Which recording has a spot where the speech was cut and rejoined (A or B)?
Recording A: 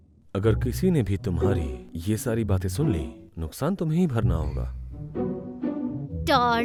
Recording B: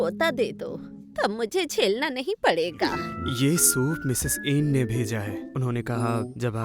B